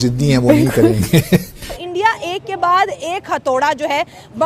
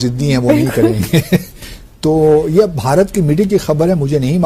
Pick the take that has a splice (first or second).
first